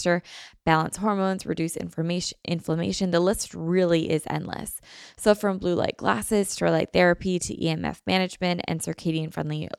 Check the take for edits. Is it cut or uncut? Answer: uncut